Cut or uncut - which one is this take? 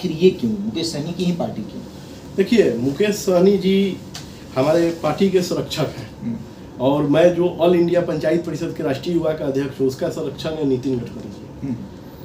uncut